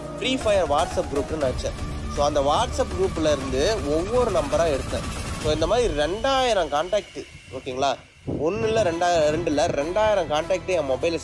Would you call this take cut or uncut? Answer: uncut